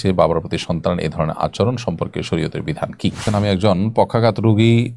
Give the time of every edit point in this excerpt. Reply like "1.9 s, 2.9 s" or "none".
3.2 s